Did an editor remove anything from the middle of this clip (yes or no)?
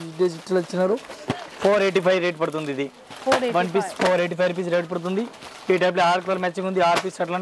no